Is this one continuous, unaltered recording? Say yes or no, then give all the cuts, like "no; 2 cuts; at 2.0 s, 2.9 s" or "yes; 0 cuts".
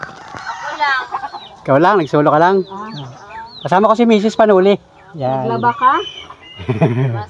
yes; 0 cuts